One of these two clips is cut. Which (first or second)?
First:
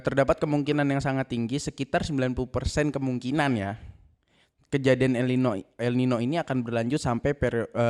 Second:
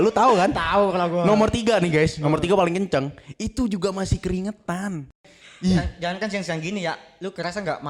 second